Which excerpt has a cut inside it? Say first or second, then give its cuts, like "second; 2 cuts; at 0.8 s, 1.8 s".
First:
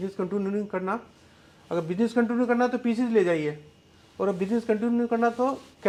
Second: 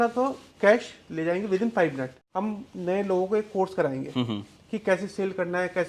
second; 1 cut; at 2.1 s